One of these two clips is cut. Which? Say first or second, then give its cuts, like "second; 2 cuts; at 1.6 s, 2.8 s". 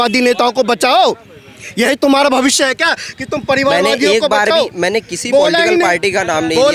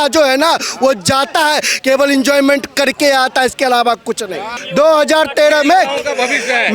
second; 1 cut; at 4.5 s